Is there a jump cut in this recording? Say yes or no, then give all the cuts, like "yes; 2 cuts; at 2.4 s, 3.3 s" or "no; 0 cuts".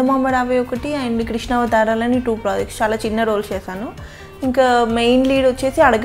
no; 0 cuts